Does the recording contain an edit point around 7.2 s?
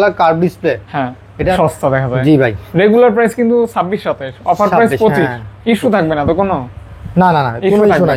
no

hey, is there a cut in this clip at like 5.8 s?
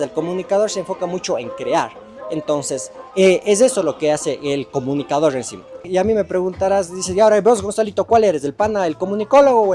yes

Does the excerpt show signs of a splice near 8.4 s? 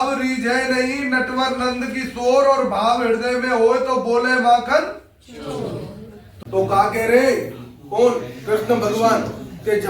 no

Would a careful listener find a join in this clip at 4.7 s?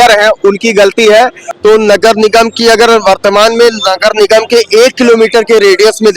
no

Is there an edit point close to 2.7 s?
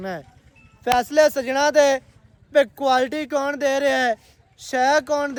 no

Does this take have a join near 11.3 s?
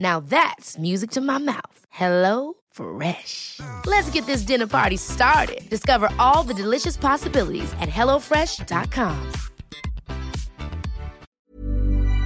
yes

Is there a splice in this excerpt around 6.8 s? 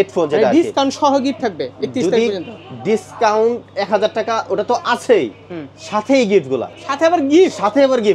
yes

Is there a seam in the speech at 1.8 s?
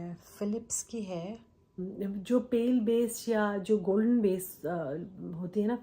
yes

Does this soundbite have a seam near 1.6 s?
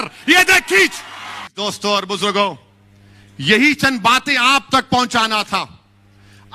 yes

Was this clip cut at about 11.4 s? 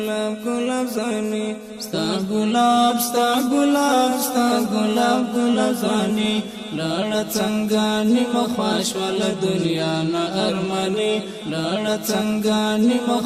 yes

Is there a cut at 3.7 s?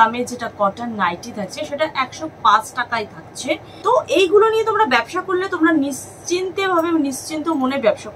yes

